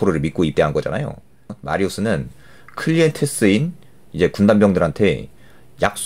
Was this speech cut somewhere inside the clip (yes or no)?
yes